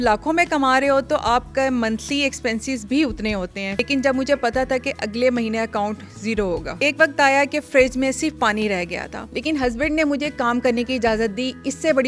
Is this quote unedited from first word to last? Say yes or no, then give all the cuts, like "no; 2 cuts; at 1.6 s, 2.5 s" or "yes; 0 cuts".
no; 3 cuts; at 3.7 s, 6.8 s, 9.1 s